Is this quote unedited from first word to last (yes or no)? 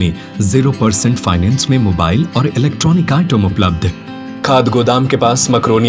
no